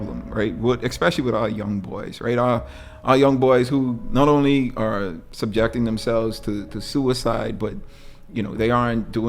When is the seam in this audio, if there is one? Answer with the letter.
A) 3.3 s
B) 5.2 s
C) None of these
B